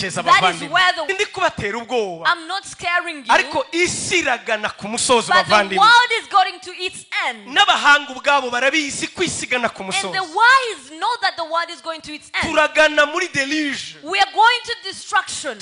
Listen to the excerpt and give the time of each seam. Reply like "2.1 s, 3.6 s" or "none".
1.1 s